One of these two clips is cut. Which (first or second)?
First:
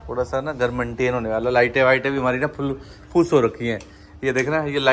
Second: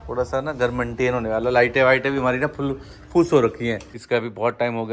second